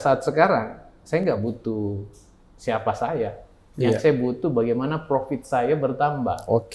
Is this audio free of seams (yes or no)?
yes